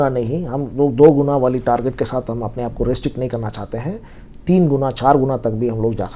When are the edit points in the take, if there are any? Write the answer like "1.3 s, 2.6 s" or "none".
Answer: none